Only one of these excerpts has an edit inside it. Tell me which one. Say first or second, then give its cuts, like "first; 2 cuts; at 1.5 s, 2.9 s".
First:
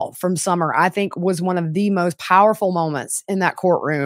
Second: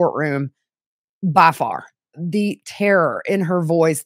second; 1 cut; at 2.1 s